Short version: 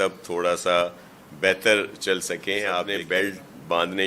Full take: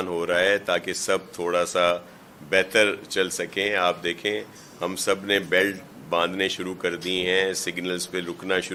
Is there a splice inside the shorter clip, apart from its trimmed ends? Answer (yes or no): yes